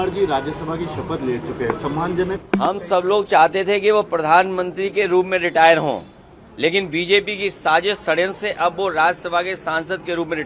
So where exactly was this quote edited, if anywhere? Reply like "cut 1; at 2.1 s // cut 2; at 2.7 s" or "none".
none